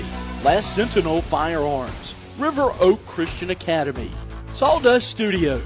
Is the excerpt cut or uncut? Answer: uncut